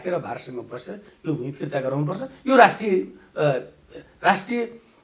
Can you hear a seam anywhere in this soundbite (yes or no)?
no